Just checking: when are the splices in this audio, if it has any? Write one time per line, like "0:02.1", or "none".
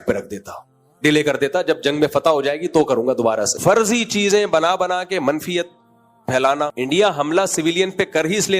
0:03.5